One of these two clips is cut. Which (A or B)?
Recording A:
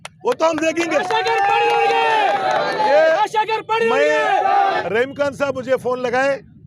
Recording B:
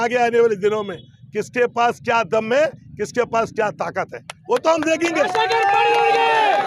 A